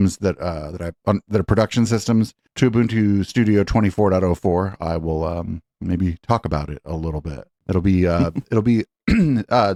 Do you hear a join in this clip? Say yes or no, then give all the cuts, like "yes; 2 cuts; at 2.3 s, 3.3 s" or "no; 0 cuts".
no; 0 cuts